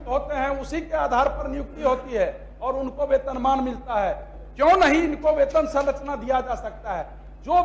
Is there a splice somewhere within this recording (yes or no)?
no